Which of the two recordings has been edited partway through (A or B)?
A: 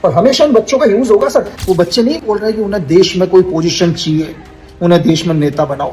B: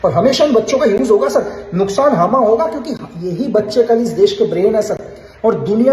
A